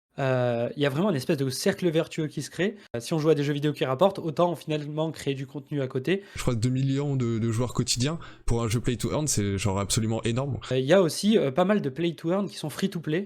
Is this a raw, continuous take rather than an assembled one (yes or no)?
no